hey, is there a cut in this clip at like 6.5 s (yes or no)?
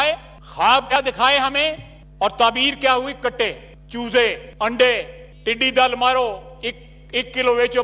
no